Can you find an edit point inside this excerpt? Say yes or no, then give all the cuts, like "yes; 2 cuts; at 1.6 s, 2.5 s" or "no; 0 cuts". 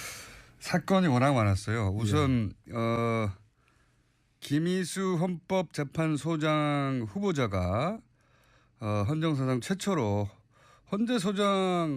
yes; 1 cut; at 5.8 s